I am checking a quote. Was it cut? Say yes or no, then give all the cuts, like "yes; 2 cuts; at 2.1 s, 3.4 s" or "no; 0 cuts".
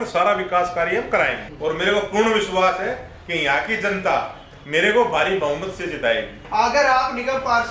yes; 3 cuts; at 1.5 s, 4.5 s, 6.4 s